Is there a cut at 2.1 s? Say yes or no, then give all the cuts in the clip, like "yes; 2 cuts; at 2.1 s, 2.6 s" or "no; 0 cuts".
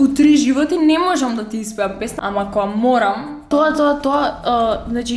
yes; 2 cuts; at 2.1 s, 3.3 s